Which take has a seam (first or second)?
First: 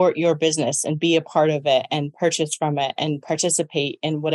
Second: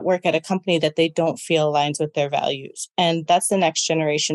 second